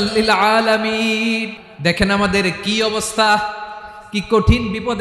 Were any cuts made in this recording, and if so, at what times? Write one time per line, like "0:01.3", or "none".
0:01.6